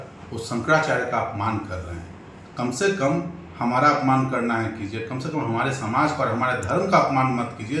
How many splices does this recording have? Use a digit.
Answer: 0